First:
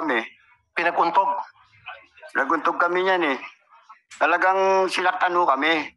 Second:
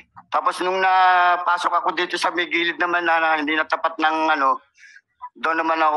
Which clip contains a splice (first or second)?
first